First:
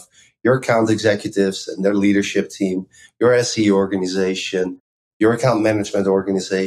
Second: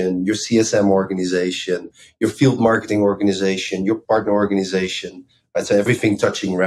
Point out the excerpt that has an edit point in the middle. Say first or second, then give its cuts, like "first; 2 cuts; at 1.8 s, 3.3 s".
second; 3 cuts; at 2.0 s, 4.0 s, 5.9 s